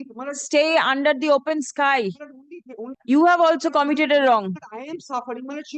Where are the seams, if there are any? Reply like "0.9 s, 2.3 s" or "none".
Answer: 2.9 s